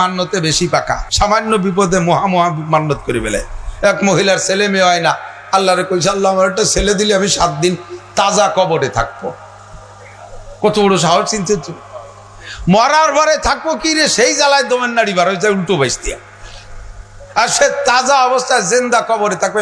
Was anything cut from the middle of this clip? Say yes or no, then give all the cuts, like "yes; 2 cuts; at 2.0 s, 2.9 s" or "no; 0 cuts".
yes; 1 cut; at 1.1 s